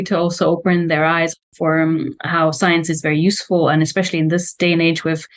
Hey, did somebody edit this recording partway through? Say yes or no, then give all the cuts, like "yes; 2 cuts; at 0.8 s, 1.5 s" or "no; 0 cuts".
yes; 1 cut; at 1.3 s